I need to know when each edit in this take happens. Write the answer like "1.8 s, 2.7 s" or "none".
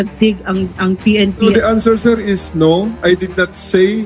1.5 s